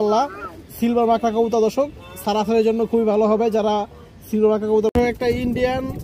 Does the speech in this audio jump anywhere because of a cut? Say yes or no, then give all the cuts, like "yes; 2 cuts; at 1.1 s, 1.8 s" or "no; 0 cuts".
yes; 1 cut; at 4.9 s